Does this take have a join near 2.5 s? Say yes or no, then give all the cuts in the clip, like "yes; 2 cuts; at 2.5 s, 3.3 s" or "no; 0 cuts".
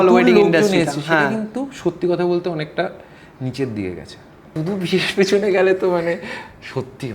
no; 1 cut; at 4.5 s